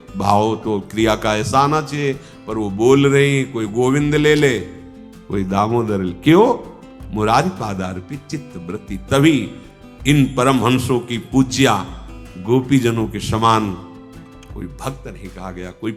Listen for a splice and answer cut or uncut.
uncut